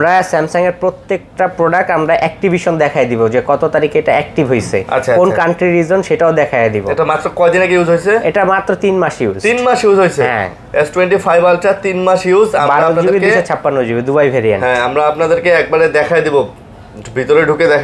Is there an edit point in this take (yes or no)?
no